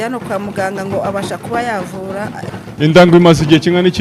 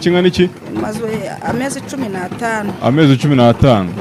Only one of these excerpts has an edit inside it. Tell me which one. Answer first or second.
first